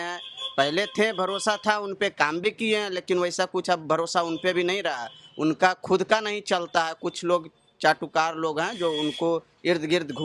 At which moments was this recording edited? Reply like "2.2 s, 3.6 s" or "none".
none

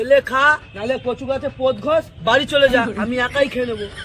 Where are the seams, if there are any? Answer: none

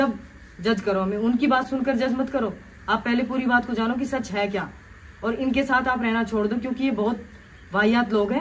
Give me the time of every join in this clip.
none

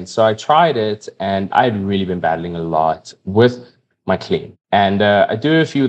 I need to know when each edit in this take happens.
1.5 s, 3.2 s, 4.5 s

